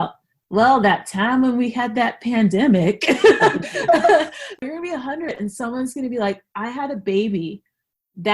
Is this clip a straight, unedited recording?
no; 1 cut; at 4.4 s

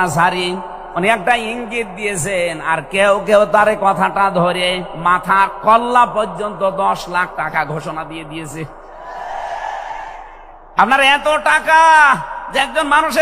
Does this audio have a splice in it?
no; 0 cuts

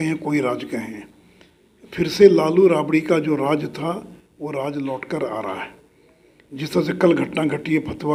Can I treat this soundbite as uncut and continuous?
yes; 0 cuts

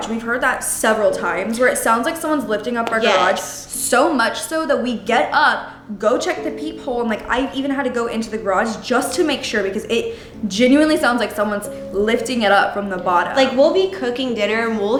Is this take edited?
no; 0 cuts

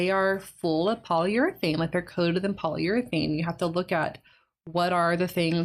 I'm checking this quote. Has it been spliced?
no; 0 cuts

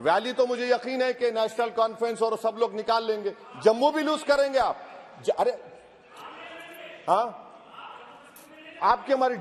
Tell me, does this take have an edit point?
no; 0 cuts

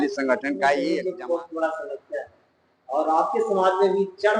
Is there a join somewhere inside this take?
yes; 1 cut; at 0.9 s

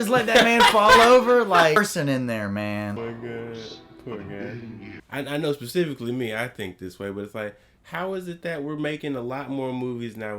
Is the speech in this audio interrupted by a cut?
yes; 3 cuts; at 1.8 s, 3.0 s, 5.0 s

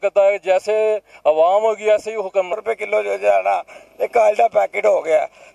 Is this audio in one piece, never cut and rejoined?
no; 1 cut; at 2.5 s

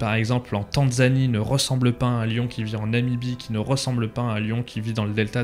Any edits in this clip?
no; 0 cuts

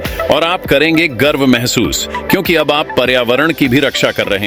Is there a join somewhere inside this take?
no; 0 cuts

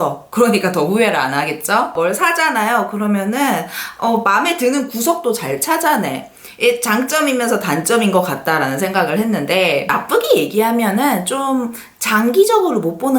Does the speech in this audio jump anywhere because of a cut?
yes; 1 cut; at 1.9 s

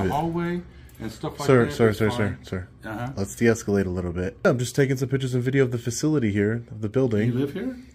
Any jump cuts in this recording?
yes; 1 cut; at 4.5 s

